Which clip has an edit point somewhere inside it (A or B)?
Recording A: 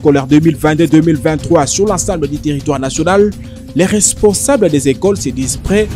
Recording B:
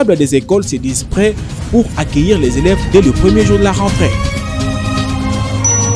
B